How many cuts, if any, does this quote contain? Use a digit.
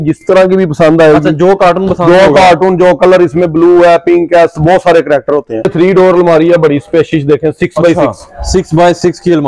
1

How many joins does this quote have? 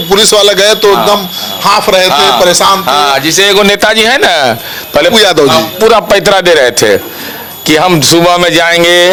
0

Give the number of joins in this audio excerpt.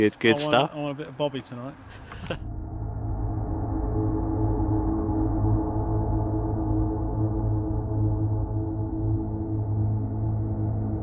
0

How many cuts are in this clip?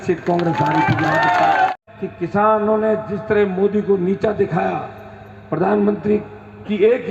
1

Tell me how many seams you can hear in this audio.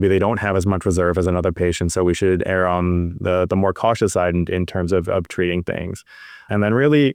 0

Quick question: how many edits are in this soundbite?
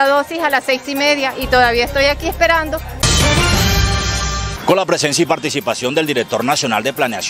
2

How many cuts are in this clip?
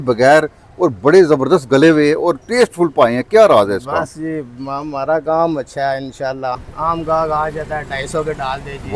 1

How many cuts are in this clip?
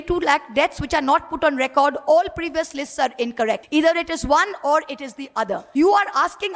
2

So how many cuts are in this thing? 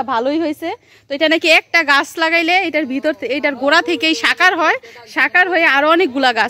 0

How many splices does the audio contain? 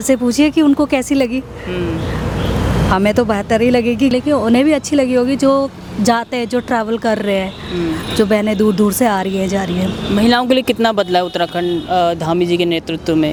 0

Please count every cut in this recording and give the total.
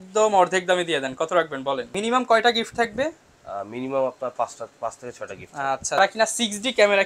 2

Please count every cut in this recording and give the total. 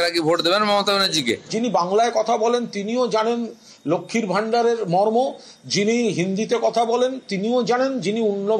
1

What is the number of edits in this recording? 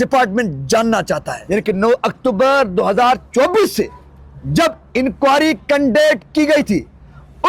1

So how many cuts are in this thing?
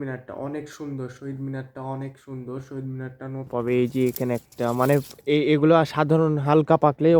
1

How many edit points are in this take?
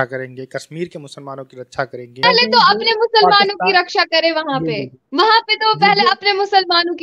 1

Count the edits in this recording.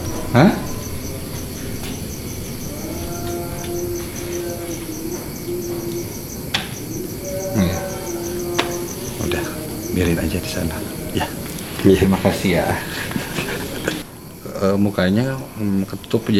1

